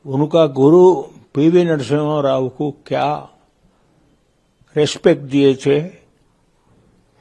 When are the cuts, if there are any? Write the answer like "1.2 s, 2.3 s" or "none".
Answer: none